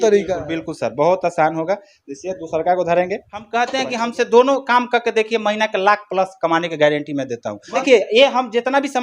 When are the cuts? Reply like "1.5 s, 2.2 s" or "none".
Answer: 3.5 s, 7.8 s